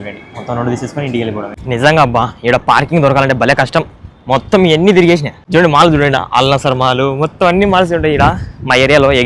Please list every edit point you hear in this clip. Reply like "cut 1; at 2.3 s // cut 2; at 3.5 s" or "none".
cut 1; at 1.6 s // cut 2; at 5.4 s